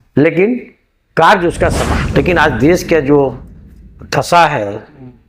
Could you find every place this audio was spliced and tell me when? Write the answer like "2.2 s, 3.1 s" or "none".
1.9 s